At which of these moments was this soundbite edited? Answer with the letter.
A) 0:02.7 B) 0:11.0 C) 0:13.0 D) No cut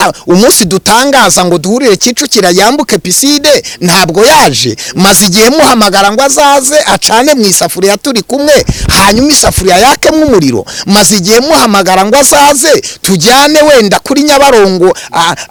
D